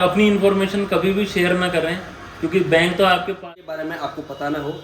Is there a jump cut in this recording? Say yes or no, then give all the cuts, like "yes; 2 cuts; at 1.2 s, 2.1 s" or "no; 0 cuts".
yes; 1 cut; at 3.3 s